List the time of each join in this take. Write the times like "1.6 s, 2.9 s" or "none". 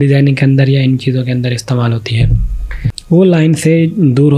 2.9 s